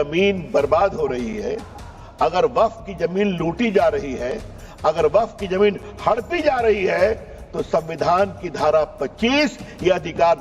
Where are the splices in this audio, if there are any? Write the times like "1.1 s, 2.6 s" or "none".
none